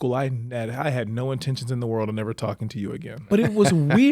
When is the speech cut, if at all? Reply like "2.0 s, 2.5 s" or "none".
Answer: 3.1 s